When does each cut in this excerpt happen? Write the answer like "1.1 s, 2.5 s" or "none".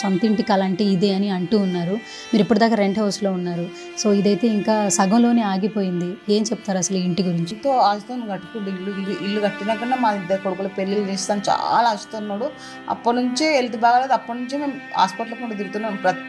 7.5 s

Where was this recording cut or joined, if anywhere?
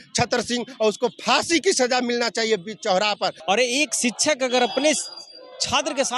3.4 s

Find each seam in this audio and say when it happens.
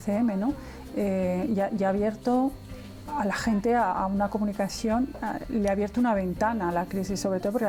none

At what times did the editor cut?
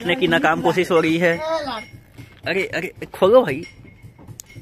none

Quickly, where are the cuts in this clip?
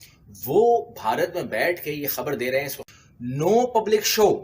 2.8 s

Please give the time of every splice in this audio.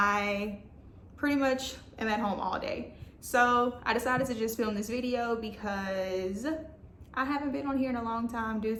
none

